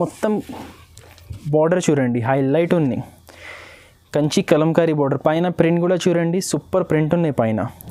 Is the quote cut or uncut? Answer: uncut